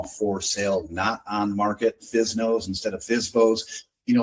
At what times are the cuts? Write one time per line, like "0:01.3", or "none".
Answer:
none